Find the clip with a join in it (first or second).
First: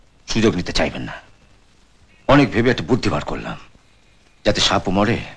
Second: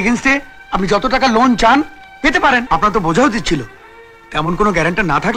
second